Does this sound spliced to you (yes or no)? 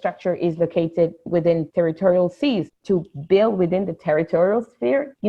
no